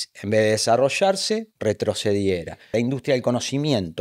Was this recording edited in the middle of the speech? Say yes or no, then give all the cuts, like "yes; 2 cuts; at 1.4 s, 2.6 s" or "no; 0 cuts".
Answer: yes; 1 cut; at 2.7 s